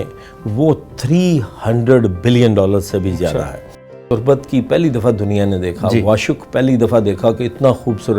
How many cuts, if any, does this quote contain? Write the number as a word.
one